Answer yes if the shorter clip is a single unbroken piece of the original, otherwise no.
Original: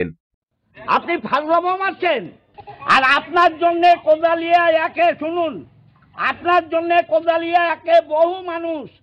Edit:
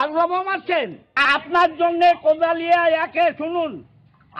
no